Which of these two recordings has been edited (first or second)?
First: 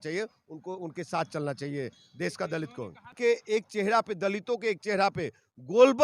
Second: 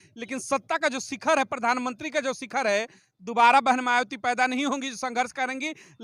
first